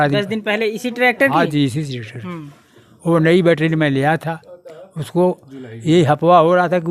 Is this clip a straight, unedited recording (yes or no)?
yes